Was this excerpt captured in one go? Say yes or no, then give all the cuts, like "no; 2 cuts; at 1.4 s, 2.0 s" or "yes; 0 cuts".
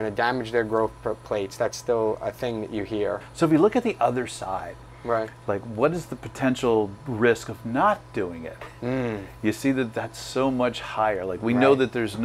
no; 1 cut; at 3.2 s